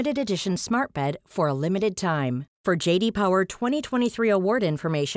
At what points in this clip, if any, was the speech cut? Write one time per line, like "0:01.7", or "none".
none